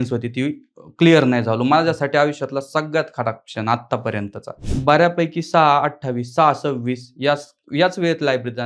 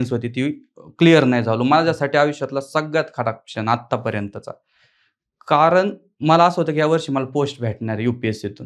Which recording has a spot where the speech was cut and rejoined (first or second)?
first